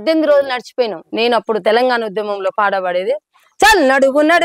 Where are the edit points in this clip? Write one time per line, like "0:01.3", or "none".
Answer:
0:01.0